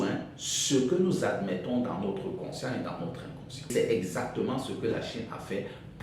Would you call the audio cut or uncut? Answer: cut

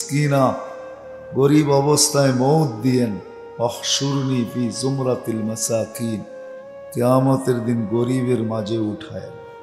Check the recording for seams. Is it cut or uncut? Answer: uncut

